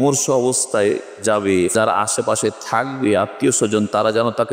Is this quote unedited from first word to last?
no; 1 cut; at 1.7 s

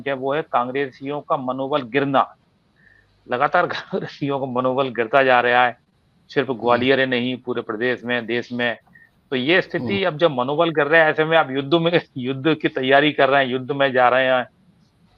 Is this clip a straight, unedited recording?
yes; 0 cuts

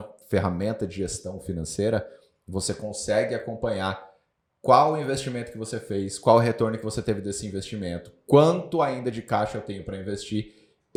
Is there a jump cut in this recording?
no; 0 cuts

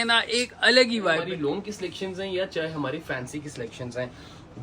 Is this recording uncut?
no; 1 cut; at 1.2 s

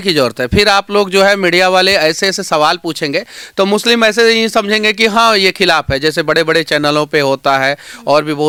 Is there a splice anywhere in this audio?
no; 0 cuts

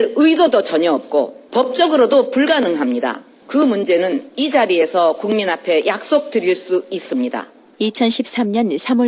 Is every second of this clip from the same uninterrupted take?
no; 2 cuts; at 1.4 s, 3.3 s

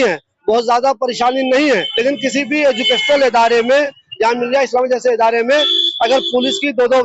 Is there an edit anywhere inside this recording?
yes; 2 cuts; at 1.9 s, 4.0 s

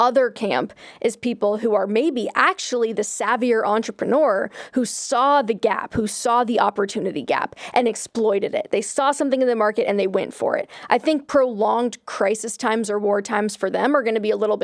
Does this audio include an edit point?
no; 0 cuts

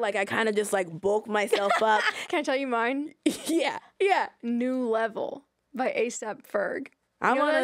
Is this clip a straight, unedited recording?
no; 2 cuts; at 2.2 s, 4.4 s

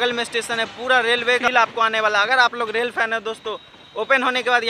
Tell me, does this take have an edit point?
yes; 1 cut; at 1.4 s

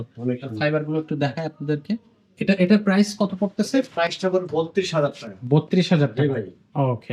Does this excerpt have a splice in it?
no; 0 cuts

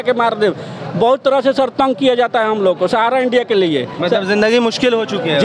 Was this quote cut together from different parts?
no; 0 cuts

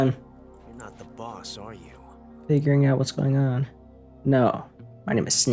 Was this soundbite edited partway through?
no; 0 cuts

